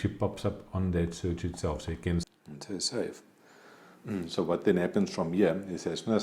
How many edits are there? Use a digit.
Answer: 1